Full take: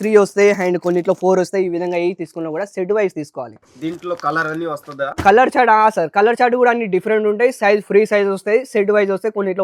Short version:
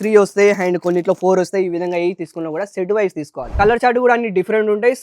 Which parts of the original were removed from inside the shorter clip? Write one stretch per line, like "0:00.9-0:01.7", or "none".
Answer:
0:03.5-0:06.1